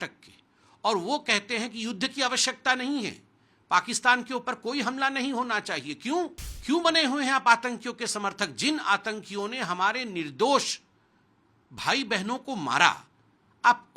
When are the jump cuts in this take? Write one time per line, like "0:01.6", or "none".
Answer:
0:06.5